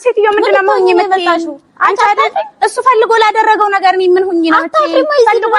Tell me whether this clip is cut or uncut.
uncut